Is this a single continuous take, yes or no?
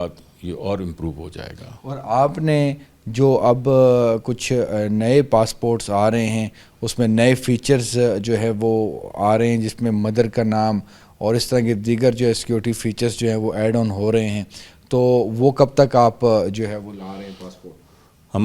yes